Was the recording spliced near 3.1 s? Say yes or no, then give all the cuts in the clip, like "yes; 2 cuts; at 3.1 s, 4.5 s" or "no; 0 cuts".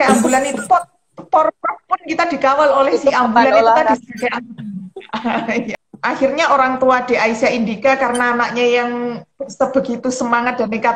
no; 1 cut; at 5.7 s